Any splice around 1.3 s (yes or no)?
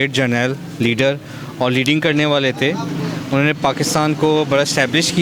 yes